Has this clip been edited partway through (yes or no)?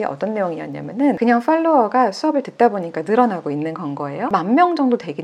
no